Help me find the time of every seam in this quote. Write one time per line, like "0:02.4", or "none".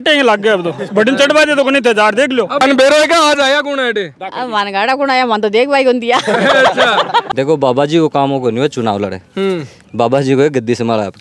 0:02.5
0:07.3